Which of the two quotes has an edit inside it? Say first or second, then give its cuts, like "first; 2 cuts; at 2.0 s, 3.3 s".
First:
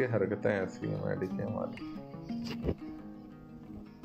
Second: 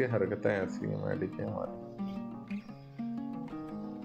second; 1 cut; at 1.7 s